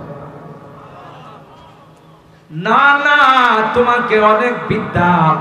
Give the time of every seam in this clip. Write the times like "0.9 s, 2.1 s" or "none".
none